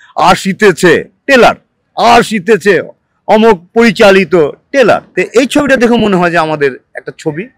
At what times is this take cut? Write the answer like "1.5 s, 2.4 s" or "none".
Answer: 5.1 s